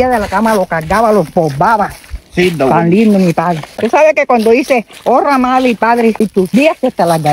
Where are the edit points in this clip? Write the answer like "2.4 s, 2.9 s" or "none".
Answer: 3.7 s, 6.3 s